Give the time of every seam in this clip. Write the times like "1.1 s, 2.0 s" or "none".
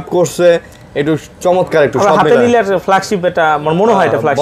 none